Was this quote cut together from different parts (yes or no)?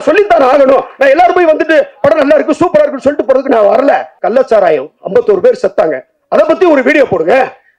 yes